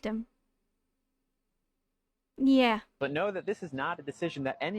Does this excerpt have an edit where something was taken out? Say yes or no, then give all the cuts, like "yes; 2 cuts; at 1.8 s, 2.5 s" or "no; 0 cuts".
yes; 1 cut; at 2.9 s